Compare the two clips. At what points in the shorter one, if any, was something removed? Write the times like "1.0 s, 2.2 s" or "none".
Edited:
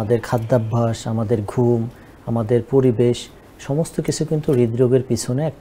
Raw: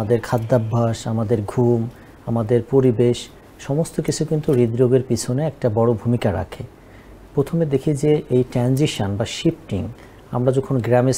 none